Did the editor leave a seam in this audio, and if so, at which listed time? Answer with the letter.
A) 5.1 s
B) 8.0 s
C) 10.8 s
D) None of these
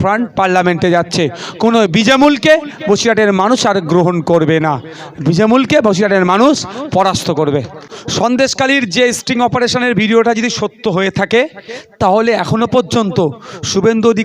B